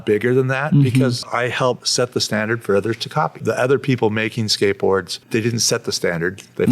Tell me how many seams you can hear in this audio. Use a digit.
3